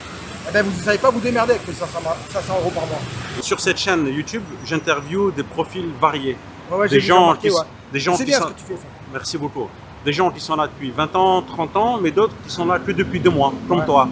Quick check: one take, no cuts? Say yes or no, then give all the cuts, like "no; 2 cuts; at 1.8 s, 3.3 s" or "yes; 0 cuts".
yes; 0 cuts